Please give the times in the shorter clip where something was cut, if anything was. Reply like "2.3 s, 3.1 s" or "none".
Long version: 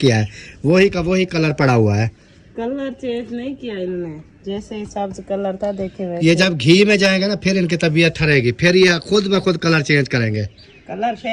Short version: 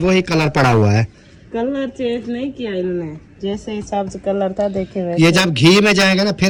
none